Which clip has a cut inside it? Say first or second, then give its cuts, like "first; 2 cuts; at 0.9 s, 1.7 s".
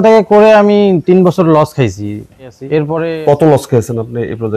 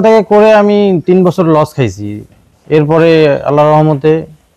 first; 1 cut; at 2.9 s